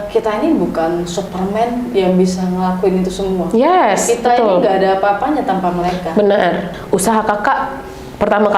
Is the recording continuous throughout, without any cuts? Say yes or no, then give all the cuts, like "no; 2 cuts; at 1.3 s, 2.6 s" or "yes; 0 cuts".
no; 1 cut; at 6.7 s